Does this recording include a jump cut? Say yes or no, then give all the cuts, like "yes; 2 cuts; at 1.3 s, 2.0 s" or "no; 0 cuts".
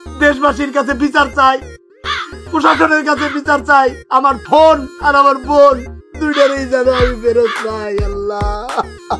no; 0 cuts